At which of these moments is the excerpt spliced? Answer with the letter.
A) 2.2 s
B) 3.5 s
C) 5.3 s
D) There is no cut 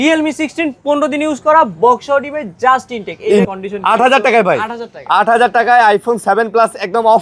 B